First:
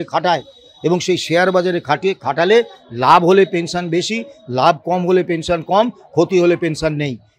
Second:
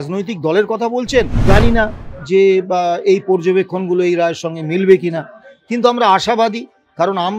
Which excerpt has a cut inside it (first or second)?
second